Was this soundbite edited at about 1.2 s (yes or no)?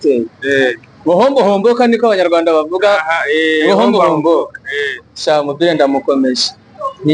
no